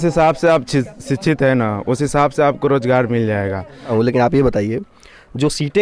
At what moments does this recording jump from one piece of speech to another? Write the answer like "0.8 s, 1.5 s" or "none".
3.9 s